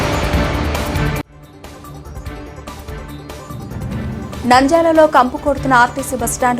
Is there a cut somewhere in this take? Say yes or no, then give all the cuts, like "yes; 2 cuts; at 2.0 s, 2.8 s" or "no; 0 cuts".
yes; 3 cuts; at 1.1 s, 2.3 s, 3.8 s